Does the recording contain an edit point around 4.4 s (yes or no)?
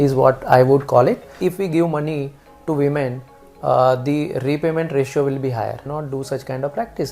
no